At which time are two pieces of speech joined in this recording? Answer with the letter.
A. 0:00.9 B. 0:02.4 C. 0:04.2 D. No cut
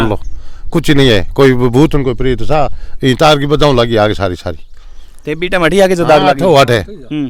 D